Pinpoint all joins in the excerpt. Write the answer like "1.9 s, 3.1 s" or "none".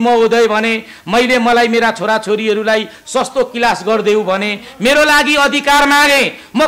none